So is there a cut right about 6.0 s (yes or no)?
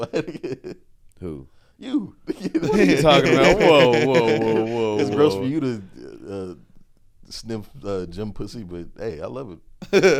no